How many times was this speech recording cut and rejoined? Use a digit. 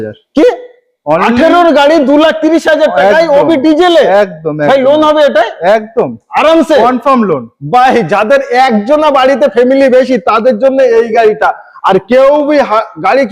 0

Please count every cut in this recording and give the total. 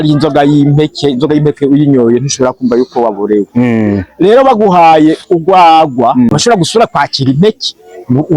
1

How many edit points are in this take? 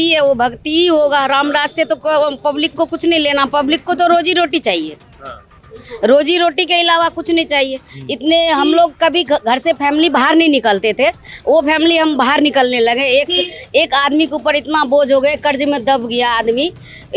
0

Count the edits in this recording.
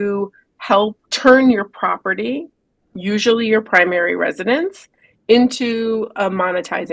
1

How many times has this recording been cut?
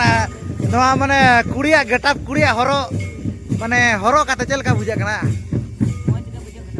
0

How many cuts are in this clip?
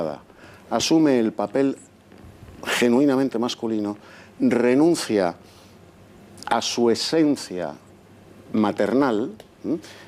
1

